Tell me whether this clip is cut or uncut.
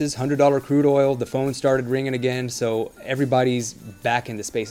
uncut